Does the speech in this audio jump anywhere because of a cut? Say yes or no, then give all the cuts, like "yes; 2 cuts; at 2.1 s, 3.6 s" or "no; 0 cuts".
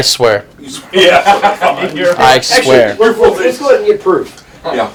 no; 0 cuts